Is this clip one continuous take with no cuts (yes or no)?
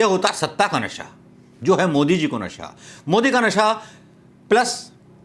yes